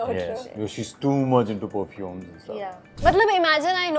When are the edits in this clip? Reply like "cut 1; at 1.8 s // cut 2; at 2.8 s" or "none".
cut 1; at 2.8 s